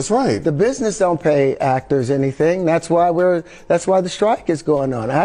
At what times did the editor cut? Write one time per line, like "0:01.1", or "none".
none